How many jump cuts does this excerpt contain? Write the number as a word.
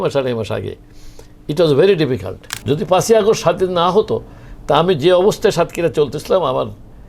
one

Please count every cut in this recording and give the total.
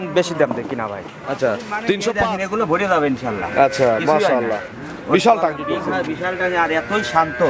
one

